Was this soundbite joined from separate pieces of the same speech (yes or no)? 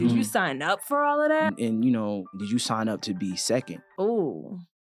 yes